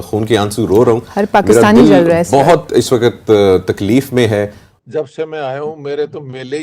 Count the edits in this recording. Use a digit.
1